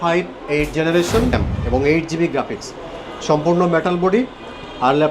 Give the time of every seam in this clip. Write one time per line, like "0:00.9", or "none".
0:01.4